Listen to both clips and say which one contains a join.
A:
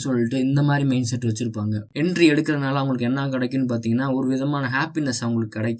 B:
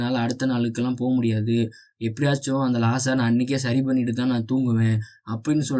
A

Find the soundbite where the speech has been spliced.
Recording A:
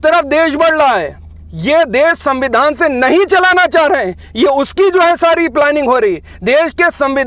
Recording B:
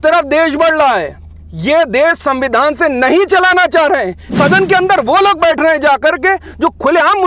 B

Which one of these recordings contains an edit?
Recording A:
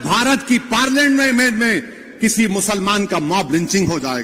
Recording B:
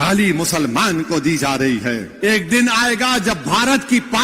B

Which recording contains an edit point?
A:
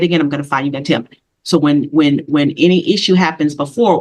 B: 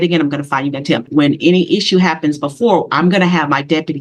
B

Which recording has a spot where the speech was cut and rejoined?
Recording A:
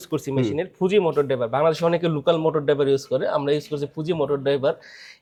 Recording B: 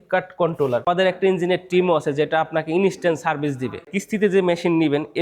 B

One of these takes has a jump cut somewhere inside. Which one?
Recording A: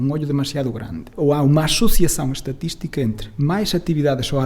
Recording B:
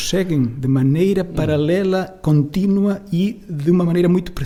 A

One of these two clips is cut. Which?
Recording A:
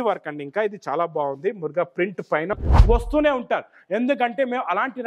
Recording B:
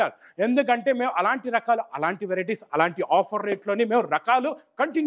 A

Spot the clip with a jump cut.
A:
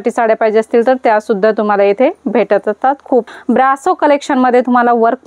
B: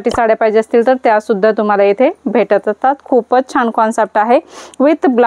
A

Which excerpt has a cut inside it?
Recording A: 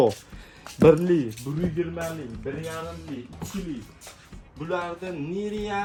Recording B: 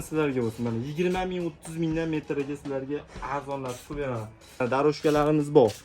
B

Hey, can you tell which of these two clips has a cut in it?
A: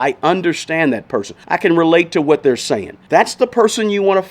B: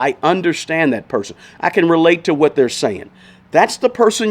A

